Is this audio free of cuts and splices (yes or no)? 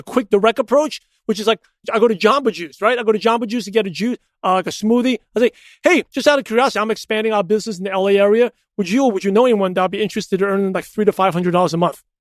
no